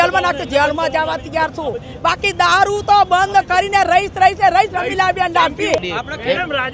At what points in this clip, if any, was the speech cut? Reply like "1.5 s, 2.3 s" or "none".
5.8 s

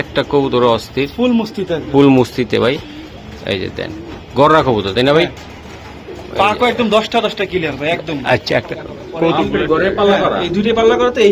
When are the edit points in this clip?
9.4 s

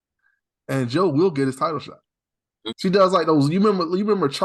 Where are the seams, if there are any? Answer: 2.5 s

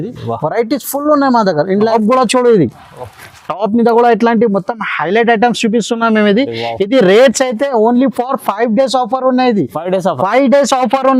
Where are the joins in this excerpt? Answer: 1.7 s

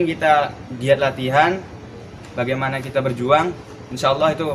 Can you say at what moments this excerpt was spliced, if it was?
2.2 s

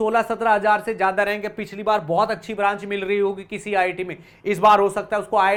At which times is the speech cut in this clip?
none

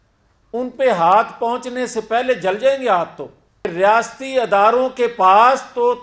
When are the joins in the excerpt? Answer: 3.7 s

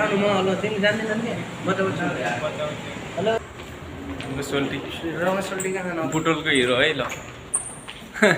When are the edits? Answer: 3.4 s

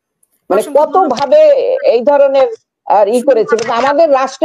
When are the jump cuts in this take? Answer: none

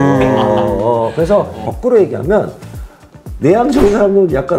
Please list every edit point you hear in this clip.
1.6 s

